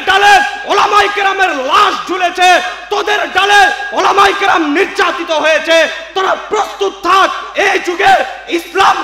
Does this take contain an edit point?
no; 0 cuts

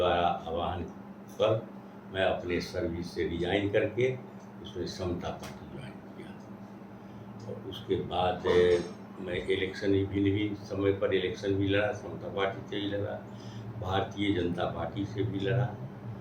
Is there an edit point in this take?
no; 0 cuts

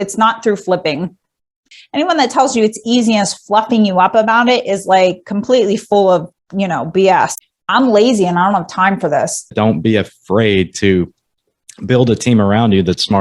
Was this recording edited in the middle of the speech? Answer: yes; 3 cuts; at 1.7 s, 7.4 s, 9.5 s

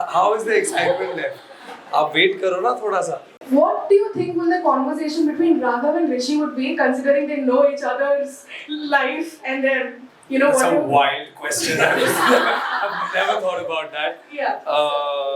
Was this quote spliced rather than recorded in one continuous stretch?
yes; 1 cut; at 3.4 s

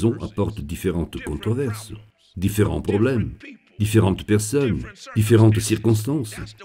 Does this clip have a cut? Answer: no; 0 cuts

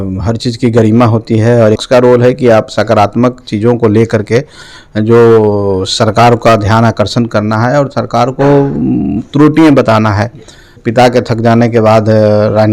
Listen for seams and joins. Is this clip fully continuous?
no; 2 cuts; at 1.8 s, 10.8 s

